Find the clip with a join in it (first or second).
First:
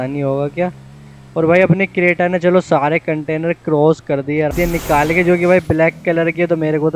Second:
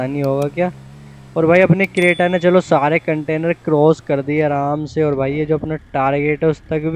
first